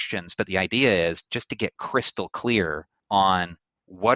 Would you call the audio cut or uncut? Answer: cut